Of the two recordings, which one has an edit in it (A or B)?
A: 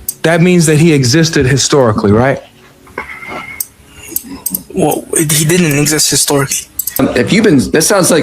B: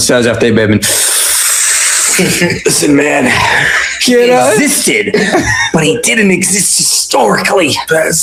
A